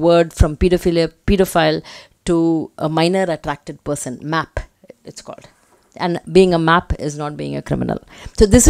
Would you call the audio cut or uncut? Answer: uncut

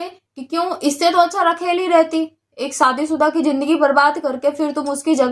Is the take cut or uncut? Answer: uncut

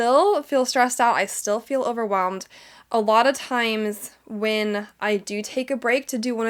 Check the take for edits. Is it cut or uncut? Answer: uncut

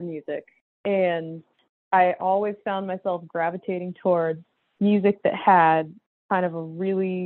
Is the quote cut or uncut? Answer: cut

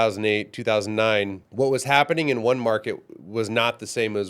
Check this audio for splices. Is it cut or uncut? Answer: cut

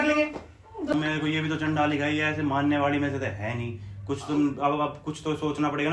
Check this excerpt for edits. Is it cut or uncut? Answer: cut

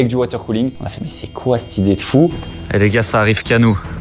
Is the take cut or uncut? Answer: cut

